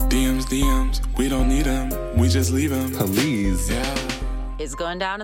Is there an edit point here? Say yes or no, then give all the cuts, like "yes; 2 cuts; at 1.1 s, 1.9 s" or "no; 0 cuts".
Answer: no; 0 cuts